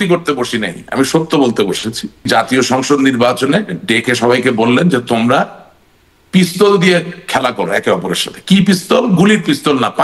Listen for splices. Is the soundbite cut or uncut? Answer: cut